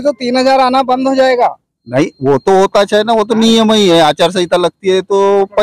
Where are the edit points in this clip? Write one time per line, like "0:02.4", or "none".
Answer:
none

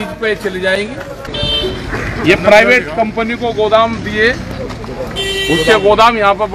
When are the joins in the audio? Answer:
0:01.2

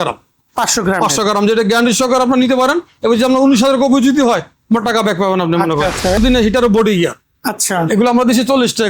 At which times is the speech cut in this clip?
0:06.2

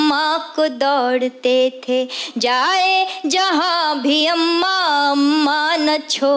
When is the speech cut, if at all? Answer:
none

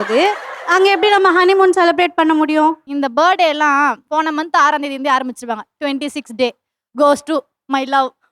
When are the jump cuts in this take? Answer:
0:02.9

